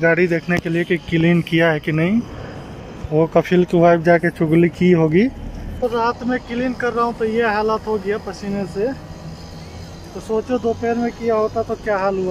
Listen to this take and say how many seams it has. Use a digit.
1